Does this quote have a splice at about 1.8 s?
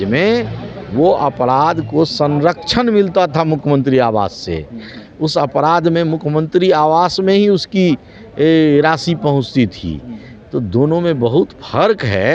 no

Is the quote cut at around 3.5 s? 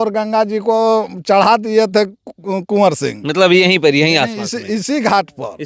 no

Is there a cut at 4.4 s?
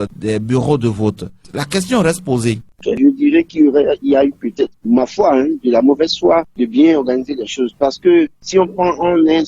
no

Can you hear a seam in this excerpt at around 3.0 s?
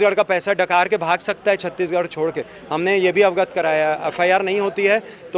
no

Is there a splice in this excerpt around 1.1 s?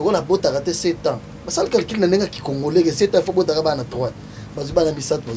no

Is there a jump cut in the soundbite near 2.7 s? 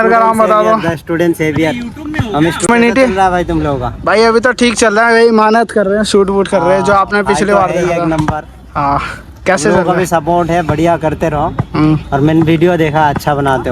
yes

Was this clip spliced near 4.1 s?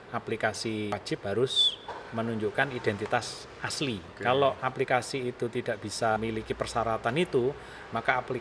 yes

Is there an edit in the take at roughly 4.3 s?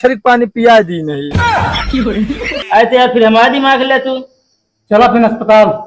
no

